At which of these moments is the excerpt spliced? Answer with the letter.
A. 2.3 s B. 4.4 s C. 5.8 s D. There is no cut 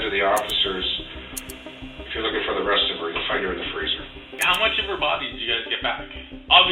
B